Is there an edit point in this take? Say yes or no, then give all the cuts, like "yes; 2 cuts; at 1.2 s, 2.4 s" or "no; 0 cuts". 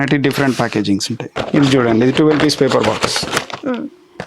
yes; 1 cut; at 1.3 s